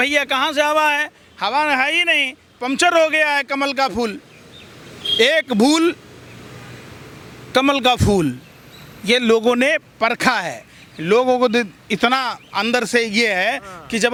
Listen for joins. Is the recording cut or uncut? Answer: uncut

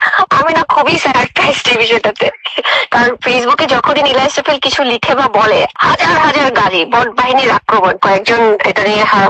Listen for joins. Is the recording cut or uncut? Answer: cut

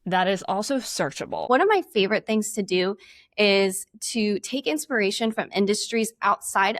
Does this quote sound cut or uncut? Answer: cut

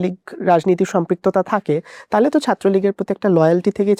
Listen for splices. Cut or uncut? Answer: uncut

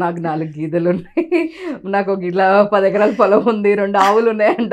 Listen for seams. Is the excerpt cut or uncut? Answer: uncut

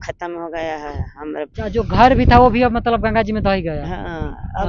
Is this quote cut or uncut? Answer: cut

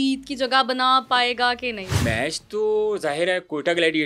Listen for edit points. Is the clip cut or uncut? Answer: cut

